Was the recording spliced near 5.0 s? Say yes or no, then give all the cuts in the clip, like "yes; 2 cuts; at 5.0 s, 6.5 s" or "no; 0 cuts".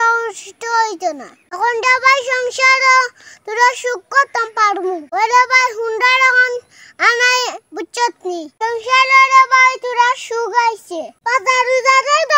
yes; 2 cuts; at 5.0 s, 11.1 s